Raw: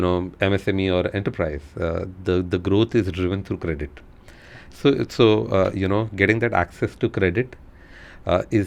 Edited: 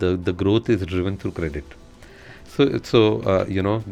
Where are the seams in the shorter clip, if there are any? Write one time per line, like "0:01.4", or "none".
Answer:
none